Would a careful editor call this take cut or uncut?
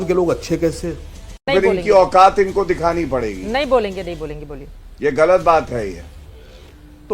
cut